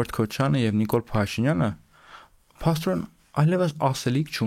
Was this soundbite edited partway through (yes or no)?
no